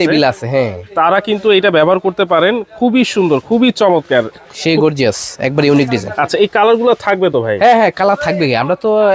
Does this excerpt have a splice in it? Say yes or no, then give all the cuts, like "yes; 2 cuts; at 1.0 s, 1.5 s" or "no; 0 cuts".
no; 0 cuts